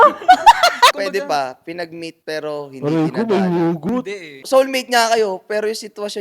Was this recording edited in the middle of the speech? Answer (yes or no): yes